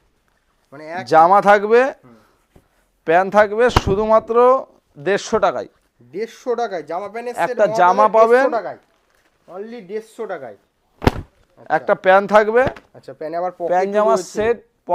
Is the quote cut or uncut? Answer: uncut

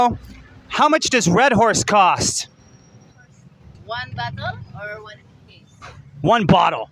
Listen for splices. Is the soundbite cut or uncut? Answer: uncut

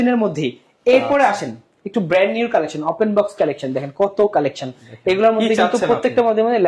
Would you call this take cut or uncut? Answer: uncut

